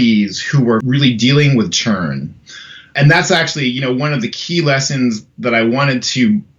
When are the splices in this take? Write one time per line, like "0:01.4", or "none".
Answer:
0:00.8
0:02.9